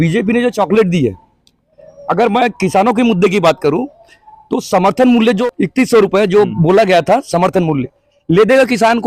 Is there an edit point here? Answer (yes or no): yes